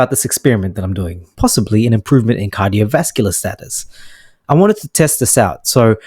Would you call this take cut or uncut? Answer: cut